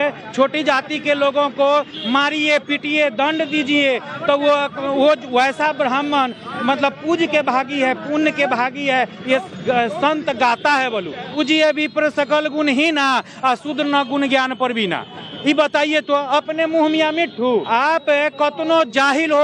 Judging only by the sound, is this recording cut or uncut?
cut